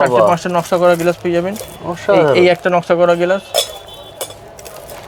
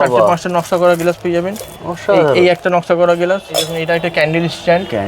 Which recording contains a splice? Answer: second; 1 cut; at 3.7 s

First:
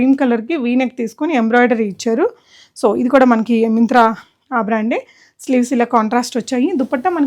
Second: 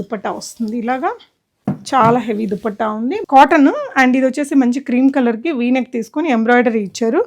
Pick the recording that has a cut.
second; 1 cut; at 3.2 s

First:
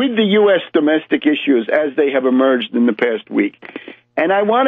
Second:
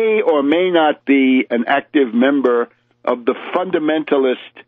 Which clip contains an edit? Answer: second; 1 cut; at 2.0 s

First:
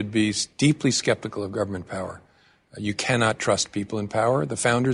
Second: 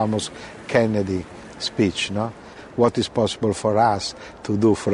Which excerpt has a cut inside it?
second; 1 cut; at 2.5 s

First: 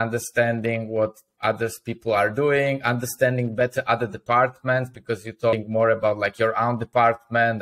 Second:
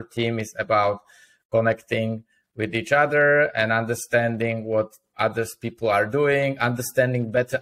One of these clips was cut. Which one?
first; 1 cut; at 5.5 s

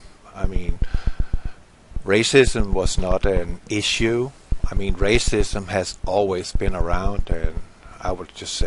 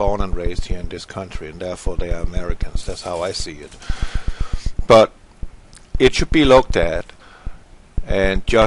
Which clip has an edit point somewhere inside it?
first; 1 cut; at 7.2 s

